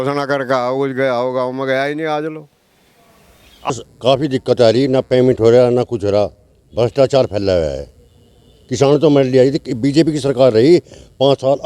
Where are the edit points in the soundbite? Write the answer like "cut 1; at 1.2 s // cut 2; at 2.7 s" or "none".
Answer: cut 1; at 3.7 s